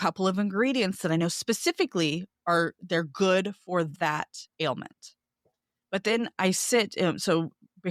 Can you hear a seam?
no; 0 cuts

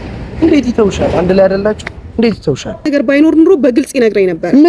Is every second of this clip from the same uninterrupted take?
no; 1 cut; at 2.9 s

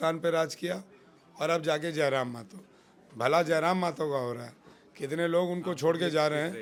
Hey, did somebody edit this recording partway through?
no; 0 cuts

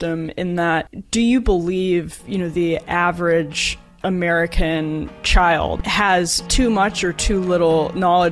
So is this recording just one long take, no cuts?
no; 1 cut; at 5.8 s

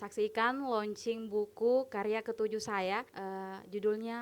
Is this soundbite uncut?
no; 1 cut; at 3.1 s

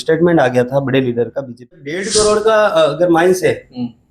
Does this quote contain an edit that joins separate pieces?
yes; 1 cut; at 2.1 s

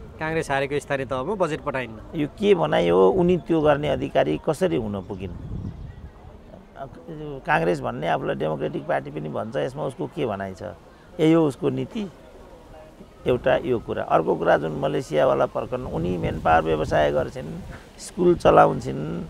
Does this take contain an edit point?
no; 0 cuts

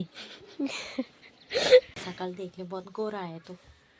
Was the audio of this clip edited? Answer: yes; 2 cuts; at 0.9 s, 1.9 s

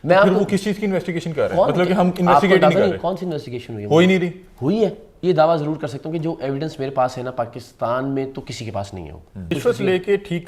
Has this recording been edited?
yes; 2 cuts; at 5.2 s, 9.5 s

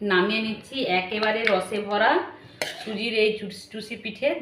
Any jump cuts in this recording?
no; 0 cuts

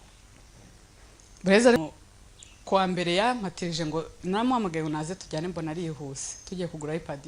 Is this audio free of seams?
no; 1 cut; at 1.8 s

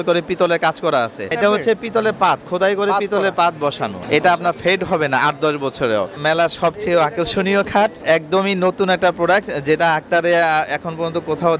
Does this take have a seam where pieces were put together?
yes; 4 cuts; at 1.3 s, 4.0 s, 6.2 s, 8.0 s

